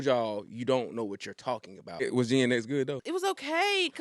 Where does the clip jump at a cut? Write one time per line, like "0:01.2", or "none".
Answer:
0:02.1
0:03.0